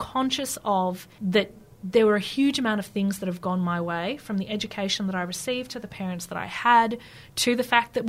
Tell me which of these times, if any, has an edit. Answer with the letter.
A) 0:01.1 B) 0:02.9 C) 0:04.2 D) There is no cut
A